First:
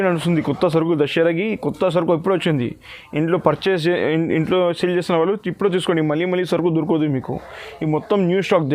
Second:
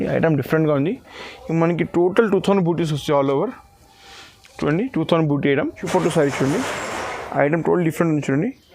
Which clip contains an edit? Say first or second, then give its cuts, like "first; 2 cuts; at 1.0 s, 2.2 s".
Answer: second; 1 cut; at 5.8 s